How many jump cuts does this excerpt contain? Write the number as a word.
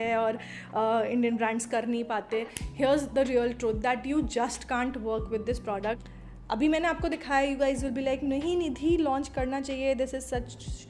one